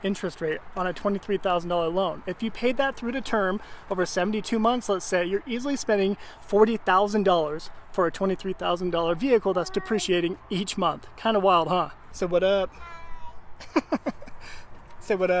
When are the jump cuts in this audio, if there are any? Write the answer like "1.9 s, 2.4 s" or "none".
none